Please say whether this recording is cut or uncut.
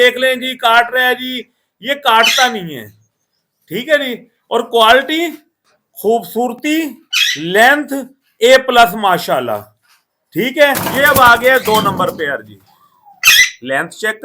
cut